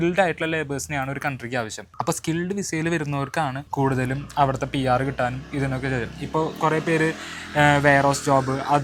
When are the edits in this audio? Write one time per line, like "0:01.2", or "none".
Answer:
none